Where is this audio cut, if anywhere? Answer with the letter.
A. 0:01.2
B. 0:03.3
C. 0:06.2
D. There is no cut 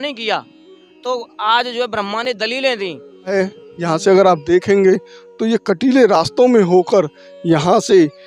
B